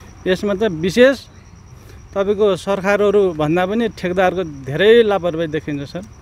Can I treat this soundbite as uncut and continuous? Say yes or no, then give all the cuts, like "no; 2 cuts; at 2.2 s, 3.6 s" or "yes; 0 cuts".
yes; 0 cuts